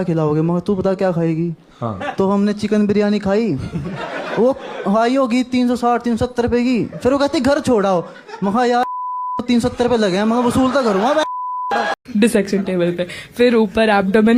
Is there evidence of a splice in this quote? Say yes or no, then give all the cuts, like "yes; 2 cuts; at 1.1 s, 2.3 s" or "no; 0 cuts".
yes; 1 cut; at 12.0 s